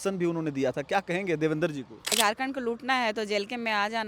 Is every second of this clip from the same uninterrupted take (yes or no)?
no